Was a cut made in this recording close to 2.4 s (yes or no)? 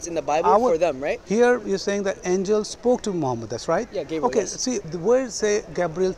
no